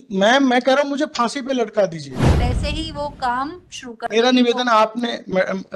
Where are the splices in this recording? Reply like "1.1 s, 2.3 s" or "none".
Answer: 2.4 s